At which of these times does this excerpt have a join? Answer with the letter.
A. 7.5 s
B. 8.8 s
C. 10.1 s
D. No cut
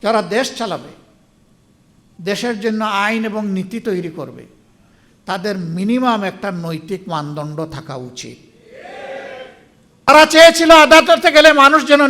C